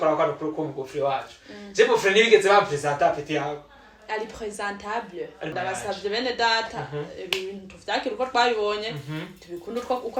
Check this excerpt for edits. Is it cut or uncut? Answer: cut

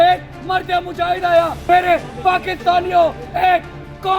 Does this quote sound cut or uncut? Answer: cut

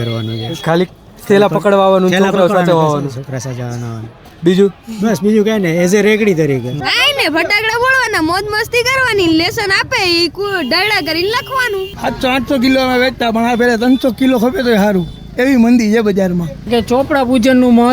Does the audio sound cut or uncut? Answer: cut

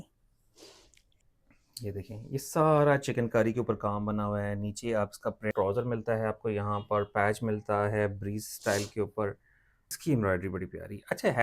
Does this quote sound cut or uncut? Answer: cut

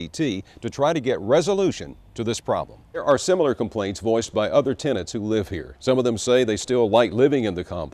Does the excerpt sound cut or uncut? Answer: cut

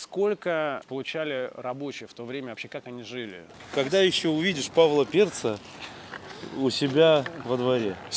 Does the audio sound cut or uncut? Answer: cut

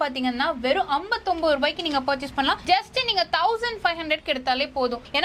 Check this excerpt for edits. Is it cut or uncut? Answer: uncut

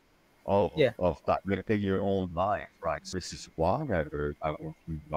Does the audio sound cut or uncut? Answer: cut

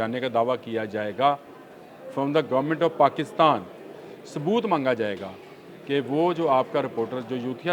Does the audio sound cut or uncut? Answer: uncut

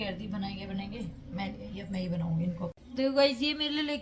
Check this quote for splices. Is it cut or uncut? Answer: cut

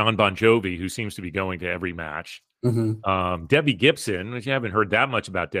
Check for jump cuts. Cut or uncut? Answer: uncut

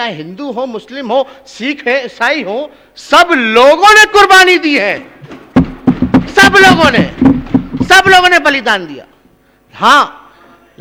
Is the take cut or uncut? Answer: uncut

